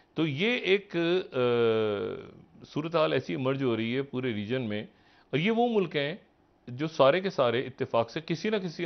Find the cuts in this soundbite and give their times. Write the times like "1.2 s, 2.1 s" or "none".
none